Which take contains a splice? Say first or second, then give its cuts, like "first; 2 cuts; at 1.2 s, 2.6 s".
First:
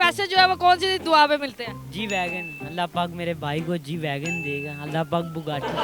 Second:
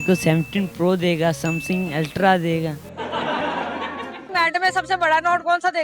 second; 1 cut; at 4.2 s